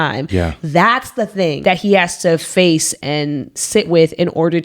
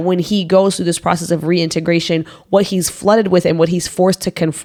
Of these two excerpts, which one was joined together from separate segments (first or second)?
first